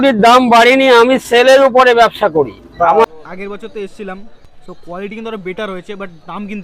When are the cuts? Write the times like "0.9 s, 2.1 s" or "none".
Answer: 3.1 s, 4.3 s